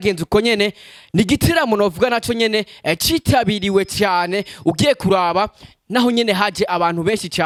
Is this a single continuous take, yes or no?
yes